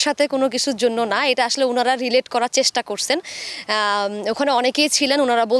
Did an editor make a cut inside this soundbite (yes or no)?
no